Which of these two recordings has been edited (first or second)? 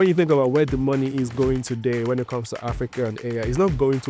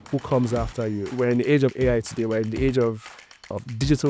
second